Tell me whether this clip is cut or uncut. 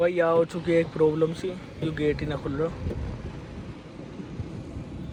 uncut